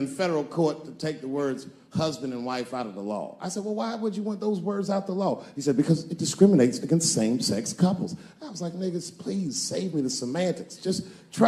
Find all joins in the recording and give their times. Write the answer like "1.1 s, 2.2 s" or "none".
none